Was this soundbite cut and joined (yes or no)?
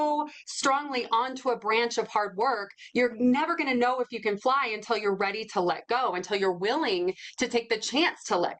no